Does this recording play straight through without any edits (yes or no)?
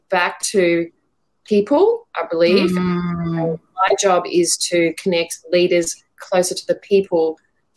yes